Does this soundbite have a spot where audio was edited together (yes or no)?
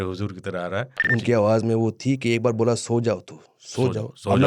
yes